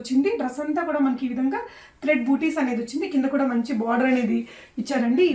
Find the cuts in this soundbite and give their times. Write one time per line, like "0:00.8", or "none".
none